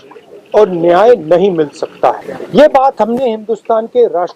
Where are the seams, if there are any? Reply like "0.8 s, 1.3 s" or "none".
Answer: 2.3 s

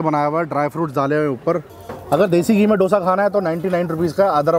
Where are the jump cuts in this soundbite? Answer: 1.7 s

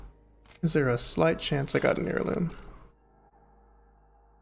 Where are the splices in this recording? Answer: 3.3 s

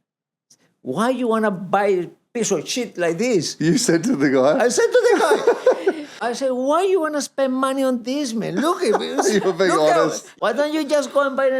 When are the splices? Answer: 6.2 s, 10.3 s

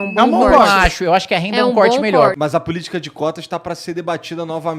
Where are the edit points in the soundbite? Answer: 2.4 s

